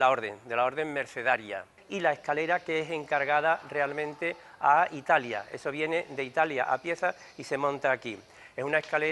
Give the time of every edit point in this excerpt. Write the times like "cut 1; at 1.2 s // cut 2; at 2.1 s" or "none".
cut 1; at 1.8 s